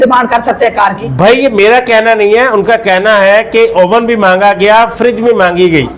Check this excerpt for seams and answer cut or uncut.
uncut